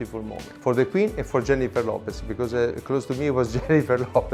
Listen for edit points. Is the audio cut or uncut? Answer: uncut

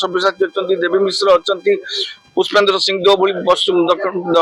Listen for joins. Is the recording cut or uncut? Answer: uncut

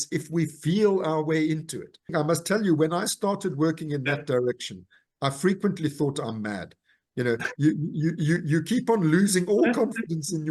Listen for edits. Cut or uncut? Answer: cut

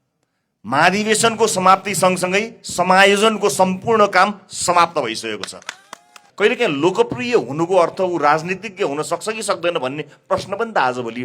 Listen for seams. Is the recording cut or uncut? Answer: cut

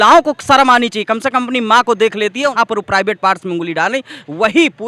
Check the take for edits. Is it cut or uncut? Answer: cut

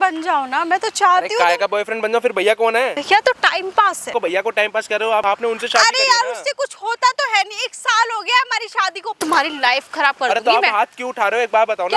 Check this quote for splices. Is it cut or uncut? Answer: cut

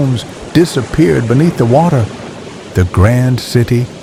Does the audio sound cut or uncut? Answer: uncut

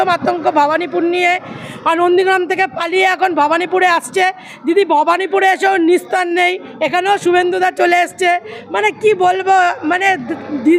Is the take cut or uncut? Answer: uncut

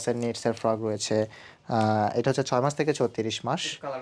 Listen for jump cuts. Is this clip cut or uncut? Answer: uncut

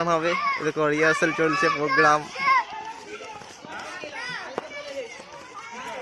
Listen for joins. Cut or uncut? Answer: uncut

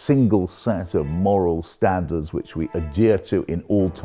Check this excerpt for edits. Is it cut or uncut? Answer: uncut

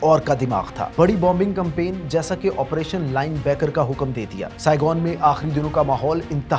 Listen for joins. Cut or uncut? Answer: cut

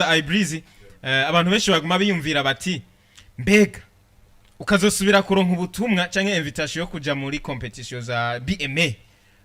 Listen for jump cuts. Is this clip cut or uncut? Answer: uncut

